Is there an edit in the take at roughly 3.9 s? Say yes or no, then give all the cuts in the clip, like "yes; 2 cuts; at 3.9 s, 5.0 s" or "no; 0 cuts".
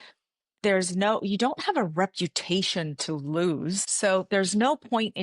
yes; 1 cut; at 3.9 s